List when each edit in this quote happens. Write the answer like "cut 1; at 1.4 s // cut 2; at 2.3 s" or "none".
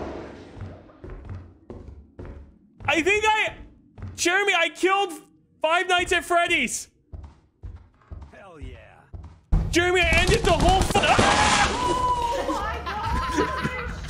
cut 1; at 11.0 s